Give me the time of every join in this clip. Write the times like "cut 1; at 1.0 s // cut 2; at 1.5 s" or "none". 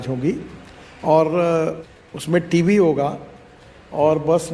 cut 1; at 1.9 s